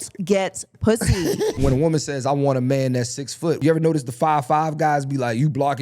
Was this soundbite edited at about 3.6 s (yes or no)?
yes